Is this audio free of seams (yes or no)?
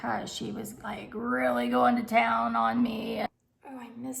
no